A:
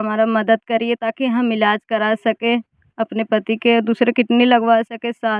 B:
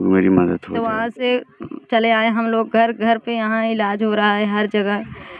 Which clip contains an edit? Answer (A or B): B